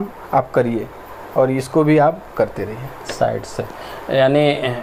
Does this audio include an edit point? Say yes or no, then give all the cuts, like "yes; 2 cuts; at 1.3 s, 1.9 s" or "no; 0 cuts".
no; 0 cuts